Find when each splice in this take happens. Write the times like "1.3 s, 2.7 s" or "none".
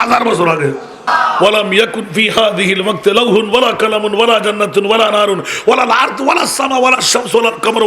1.1 s

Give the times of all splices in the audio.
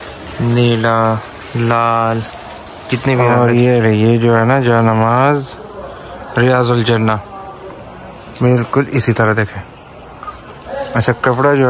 3.3 s

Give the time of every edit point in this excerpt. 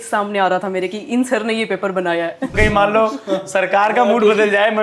2.5 s

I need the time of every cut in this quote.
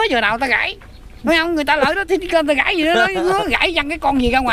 none

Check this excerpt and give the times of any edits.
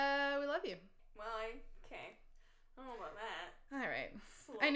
1.0 s

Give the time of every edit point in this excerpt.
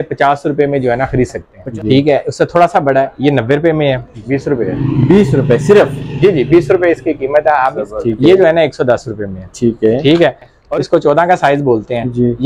1.5 s, 4.1 s, 7.8 s, 10.6 s

